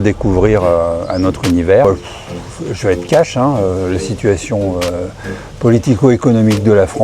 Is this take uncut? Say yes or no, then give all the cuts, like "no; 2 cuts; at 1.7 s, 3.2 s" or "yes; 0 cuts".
no; 1 cut; at 1.8 s